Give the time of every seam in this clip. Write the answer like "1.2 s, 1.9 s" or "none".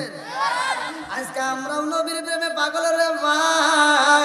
1.2 s